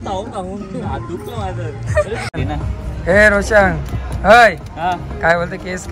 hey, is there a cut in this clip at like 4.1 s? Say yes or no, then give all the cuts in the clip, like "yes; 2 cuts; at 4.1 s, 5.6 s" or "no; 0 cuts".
no; 1 cut; at 2.3 s